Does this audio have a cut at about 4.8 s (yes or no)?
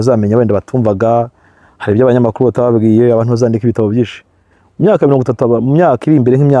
no